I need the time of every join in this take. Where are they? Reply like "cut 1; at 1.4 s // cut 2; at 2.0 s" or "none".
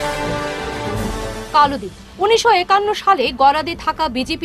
cut 1; at 0.9 s